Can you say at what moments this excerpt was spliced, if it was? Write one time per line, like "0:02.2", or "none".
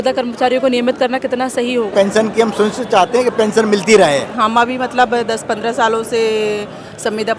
0:01.9
0:04.3